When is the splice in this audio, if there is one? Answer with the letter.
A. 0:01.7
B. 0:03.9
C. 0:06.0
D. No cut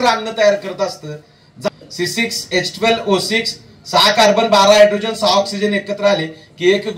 A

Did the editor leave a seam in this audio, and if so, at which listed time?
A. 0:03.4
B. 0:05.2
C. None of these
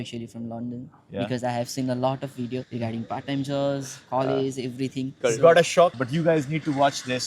B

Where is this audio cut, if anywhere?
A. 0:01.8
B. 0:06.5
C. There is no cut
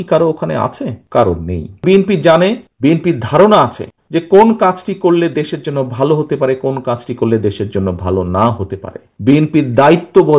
A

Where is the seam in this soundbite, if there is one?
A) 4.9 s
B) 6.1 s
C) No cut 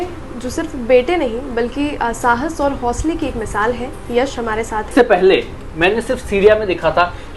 A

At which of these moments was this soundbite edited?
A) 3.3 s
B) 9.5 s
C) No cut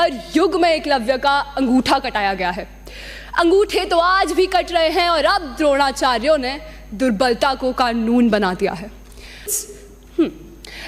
B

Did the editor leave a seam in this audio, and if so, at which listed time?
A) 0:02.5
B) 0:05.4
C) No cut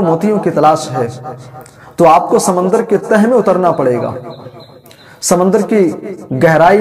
C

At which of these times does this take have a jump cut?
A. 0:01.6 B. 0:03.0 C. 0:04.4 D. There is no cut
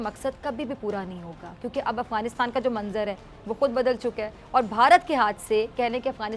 D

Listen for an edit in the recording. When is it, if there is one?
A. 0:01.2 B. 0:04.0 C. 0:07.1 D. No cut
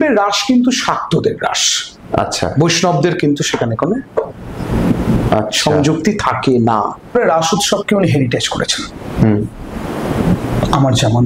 C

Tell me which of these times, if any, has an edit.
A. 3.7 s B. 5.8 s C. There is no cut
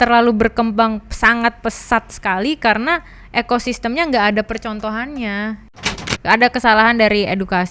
B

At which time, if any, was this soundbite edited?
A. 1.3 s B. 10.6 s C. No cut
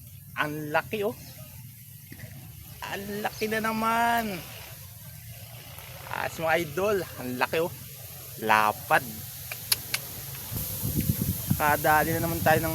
B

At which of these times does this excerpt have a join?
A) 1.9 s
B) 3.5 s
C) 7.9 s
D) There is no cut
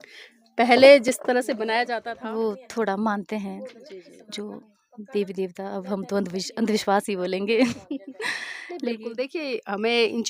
A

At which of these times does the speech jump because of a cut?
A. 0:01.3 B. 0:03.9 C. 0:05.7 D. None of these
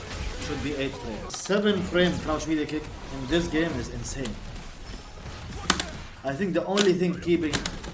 A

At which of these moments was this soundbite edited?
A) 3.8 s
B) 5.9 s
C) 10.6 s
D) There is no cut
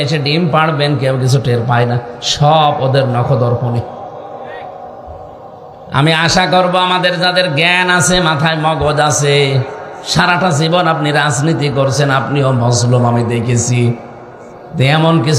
B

